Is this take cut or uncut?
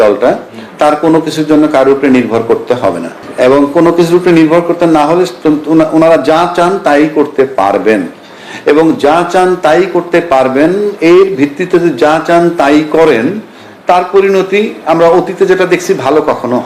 uncut